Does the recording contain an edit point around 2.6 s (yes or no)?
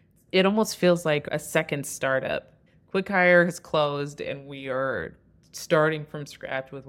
yes